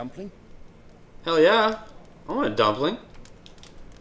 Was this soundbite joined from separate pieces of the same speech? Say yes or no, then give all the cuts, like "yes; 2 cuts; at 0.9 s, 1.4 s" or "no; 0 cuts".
no; 0 cuts